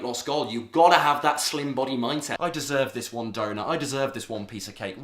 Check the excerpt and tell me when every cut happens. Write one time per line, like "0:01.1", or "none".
0:02.3